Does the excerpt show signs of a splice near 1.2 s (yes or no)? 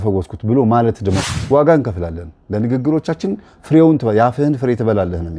yes